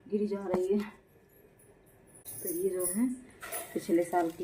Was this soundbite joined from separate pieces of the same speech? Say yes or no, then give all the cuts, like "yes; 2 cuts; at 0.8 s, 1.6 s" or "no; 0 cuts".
no; 0 cuts